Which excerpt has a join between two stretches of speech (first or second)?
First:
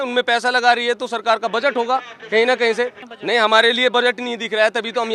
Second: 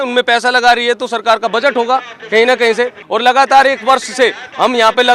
second